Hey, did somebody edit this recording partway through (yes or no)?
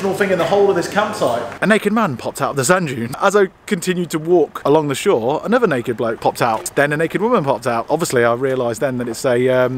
yes